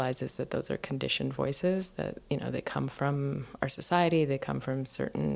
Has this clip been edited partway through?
no; 0 cuts

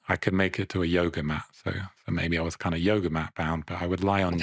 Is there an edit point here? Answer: no; 0 cuts

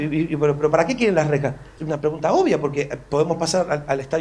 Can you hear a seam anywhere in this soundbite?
yes; 1 cut; at 1.7 s

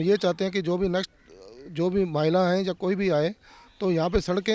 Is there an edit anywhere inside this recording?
no; 0 cuts

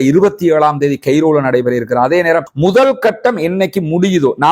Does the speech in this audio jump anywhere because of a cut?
yes; 1 cut; at 2.4 s

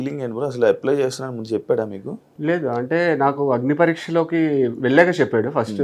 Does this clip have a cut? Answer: no; 0 cuts

